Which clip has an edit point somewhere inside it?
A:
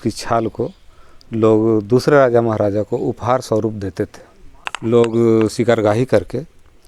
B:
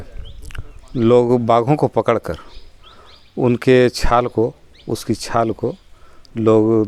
A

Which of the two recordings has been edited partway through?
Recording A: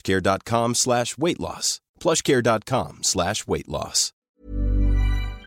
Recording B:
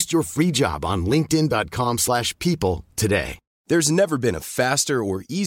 A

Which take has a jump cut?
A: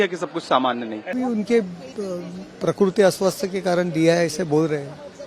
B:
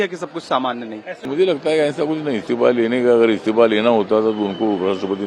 B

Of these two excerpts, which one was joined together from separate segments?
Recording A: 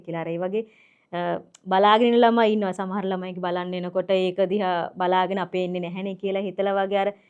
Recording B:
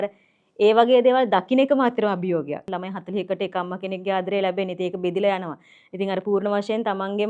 B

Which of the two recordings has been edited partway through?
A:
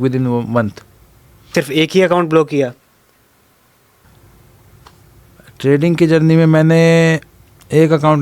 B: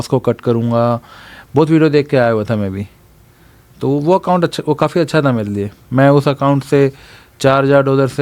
A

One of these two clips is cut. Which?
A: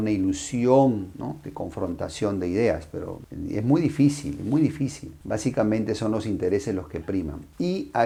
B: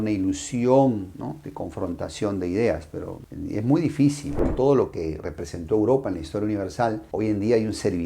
B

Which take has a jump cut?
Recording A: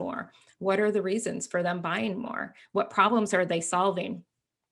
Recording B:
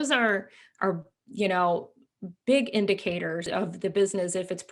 B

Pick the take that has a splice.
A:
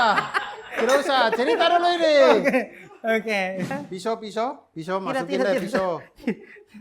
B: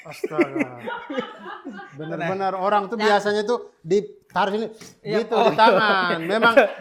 A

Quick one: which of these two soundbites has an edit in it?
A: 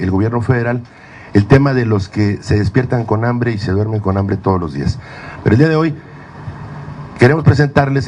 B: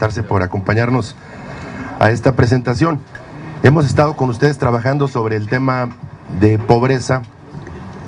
A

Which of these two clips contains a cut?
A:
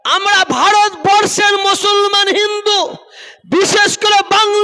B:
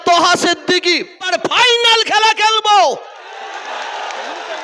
B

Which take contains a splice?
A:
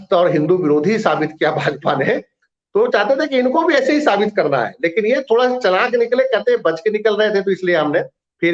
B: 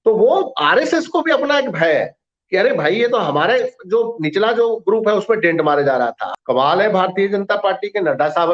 B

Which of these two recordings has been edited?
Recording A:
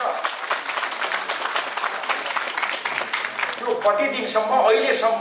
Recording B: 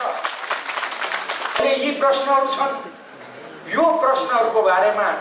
B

